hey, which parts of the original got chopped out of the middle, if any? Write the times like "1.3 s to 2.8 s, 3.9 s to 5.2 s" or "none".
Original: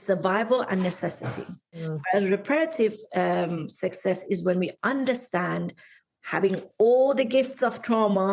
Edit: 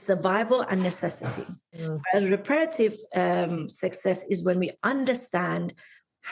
none